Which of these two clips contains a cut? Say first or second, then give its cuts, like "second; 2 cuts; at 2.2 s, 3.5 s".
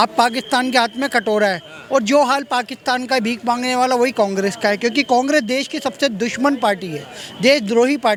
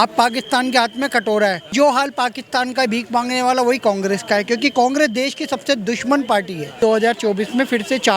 second; 2 cuts; at 1.7 s, 6.8 s